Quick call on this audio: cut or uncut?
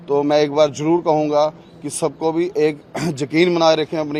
uncut